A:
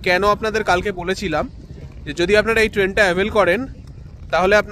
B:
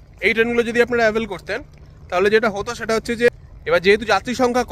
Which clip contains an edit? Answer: B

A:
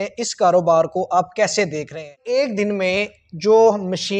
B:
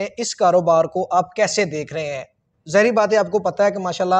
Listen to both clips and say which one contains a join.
A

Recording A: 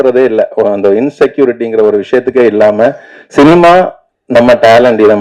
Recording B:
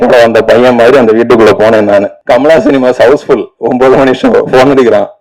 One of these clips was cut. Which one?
B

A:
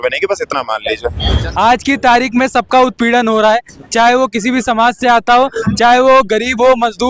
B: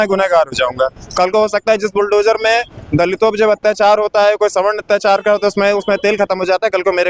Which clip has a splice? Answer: A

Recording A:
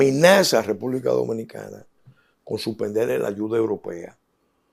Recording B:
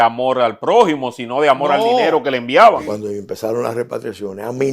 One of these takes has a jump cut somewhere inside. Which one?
B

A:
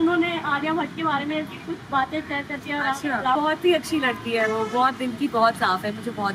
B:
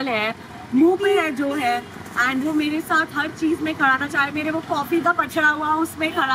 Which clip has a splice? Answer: A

